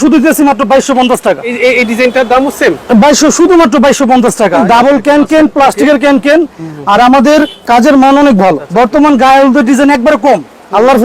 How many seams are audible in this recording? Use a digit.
3